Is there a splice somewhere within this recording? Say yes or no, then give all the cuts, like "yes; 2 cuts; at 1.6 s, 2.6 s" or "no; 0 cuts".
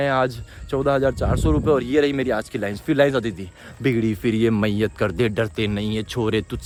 no; 0 cuts